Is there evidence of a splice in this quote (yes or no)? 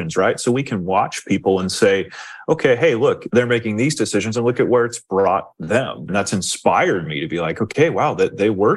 yes